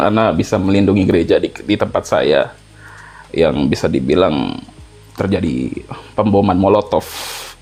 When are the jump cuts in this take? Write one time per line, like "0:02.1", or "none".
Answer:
none